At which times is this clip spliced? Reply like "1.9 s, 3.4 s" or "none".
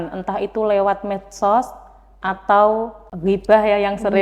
3.0 s